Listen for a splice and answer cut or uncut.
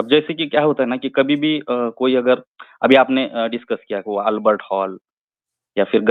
uncut